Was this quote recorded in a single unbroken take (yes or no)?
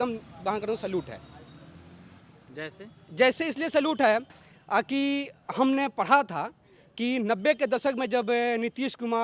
yes